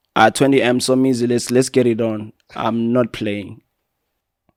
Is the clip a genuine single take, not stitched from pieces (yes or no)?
yes